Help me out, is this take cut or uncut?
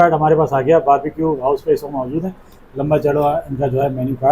uncut